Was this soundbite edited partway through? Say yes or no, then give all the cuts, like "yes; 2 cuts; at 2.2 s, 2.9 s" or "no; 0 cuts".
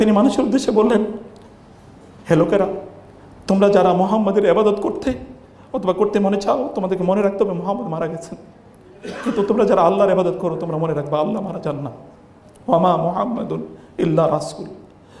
no; 0 cuts